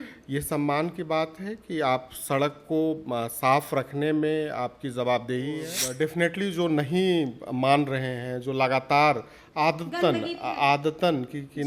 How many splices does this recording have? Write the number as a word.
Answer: one